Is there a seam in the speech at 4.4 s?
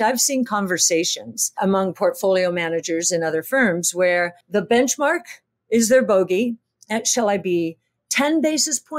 yes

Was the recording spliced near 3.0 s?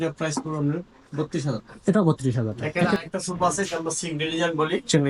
yes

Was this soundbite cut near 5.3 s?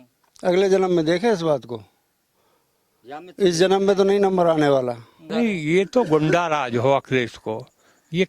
yes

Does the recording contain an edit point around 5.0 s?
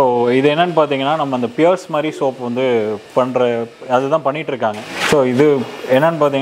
no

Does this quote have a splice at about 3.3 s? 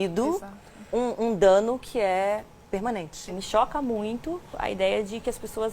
yes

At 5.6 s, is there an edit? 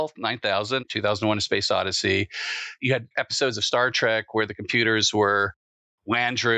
no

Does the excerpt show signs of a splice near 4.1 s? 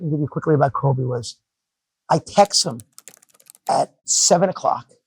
yes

